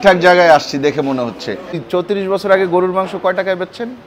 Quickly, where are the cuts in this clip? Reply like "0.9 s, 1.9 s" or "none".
1.8 s